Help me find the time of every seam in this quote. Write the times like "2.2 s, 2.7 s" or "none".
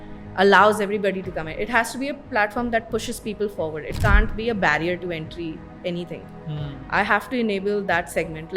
none